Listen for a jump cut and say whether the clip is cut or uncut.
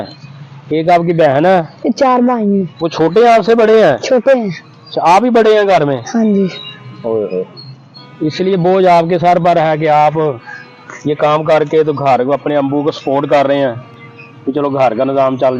uncut